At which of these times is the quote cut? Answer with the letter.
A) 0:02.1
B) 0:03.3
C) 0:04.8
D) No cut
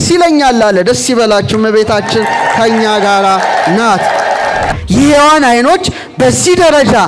C